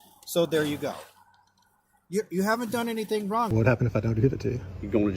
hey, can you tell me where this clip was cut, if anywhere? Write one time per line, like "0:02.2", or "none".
0:03.5